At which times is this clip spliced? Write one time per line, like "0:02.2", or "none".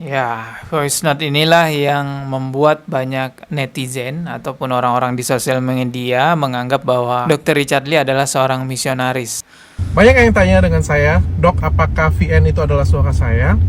0:09.3